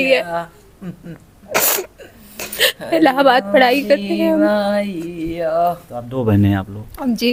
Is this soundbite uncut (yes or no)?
yes